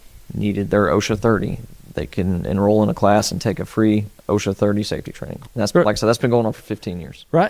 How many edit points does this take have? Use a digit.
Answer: 1